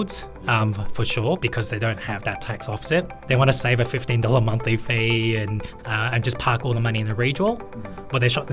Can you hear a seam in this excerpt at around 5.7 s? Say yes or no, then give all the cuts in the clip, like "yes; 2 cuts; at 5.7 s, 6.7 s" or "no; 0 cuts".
yes; 3 cuts; at 1.4 s, 3.2 s, 5.7 s